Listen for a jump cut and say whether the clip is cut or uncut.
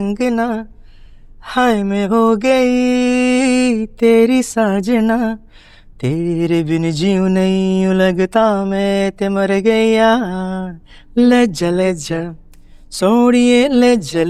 uncut